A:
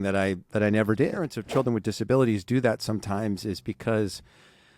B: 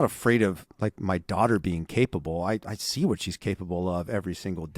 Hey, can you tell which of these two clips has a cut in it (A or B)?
A